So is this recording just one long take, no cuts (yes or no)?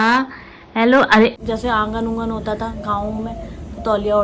no